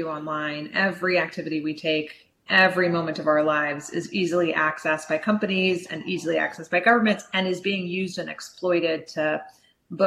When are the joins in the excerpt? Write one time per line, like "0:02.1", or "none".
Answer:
0:02.4